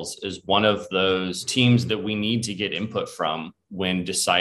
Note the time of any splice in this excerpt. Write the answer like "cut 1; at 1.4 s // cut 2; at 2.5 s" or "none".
cut 1; at 1.4 s